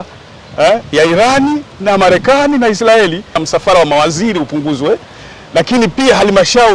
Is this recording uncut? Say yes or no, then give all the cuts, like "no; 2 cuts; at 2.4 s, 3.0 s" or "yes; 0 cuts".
no; 1 cut; at 3.4 s